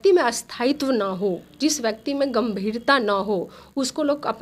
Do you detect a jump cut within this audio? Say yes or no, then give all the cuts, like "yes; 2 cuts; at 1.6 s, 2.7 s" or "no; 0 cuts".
no; 0 cuts